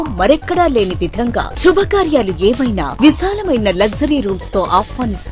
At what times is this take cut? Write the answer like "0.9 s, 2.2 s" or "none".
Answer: none